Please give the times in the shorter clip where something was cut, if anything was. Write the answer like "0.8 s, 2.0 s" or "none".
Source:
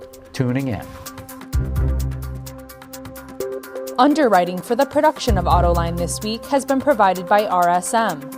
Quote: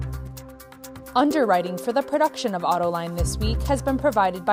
1.1 s